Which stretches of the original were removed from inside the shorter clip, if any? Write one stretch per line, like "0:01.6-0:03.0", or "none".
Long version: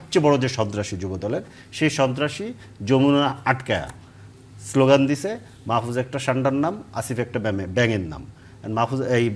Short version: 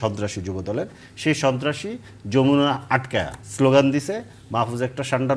0:04.0-0:04.6

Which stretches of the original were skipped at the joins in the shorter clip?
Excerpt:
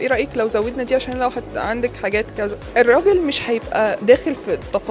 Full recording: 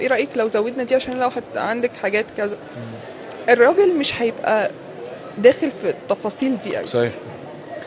0:02.6-0:03.3
0:04.7-0:05.3

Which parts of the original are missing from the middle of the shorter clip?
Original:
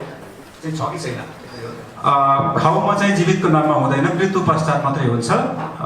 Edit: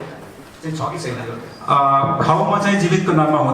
0:01.3-0:01.6

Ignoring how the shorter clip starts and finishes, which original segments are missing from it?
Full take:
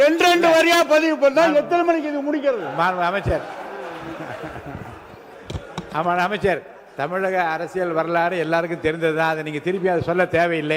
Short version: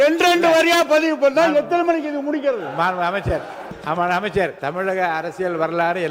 0:03.7-0:05.7
0:06.7-0:06.9

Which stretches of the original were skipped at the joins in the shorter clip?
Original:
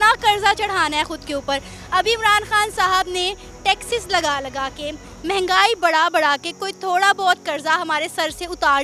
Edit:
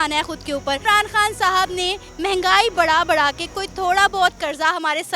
0:01.6-0:02.2
0:03.4-0:05.1

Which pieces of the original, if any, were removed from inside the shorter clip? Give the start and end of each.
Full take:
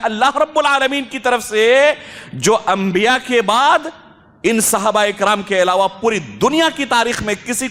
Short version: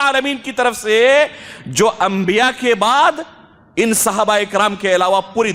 none

